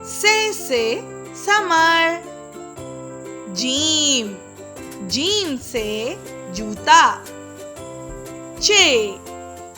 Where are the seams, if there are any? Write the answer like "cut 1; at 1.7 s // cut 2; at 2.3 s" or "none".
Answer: cut 1; at 2.2 s // cut 2; at 3.5 s